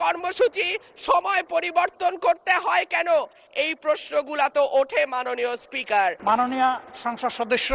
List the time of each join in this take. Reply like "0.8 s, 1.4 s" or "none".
6.2 s